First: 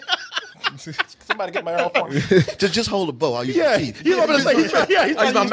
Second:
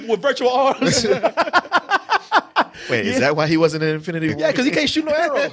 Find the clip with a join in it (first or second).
second